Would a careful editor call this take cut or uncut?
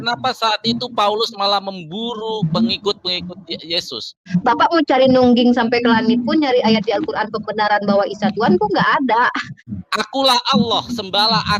cut